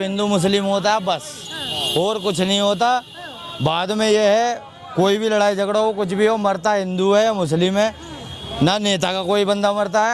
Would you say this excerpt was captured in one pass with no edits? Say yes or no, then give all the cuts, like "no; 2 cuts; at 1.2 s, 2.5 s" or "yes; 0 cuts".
yes; 0 cuts